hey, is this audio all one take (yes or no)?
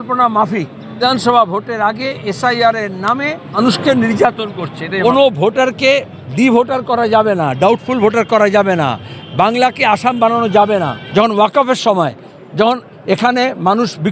no